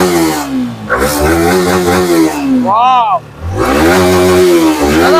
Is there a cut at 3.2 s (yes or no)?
no